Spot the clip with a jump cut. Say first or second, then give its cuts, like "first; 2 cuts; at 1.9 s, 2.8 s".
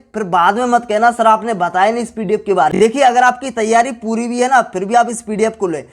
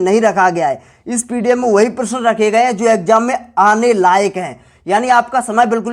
first; 1 cut; at 2.7 s